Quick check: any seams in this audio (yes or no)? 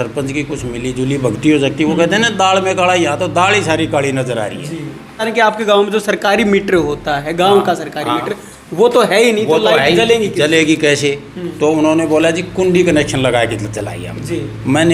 yes